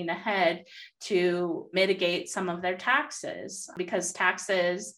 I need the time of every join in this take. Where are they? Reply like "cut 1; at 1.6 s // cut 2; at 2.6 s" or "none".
cut 1; at 1.7 s // cut 2; at 3.7 s